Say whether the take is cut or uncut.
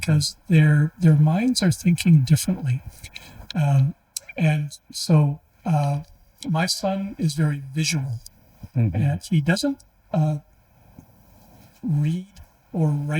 uncut